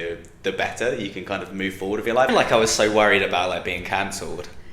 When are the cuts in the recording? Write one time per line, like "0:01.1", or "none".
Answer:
0:02.3